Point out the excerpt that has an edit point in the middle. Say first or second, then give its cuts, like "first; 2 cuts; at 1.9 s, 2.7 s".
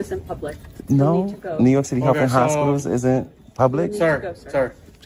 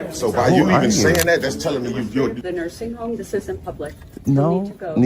second; 1 cut; at 2.4 s